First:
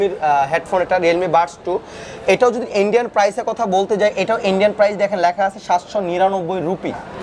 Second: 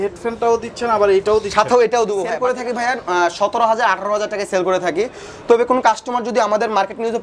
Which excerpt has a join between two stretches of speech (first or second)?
second